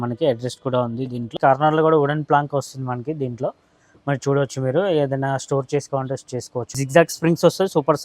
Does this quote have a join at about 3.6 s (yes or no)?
no